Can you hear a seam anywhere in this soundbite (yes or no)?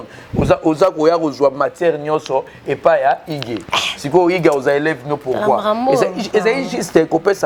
no